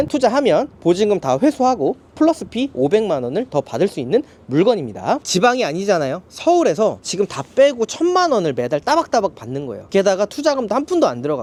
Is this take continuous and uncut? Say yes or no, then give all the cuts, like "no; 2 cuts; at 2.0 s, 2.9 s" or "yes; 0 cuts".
yes; 0 cuts